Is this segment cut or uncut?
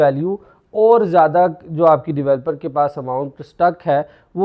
uncut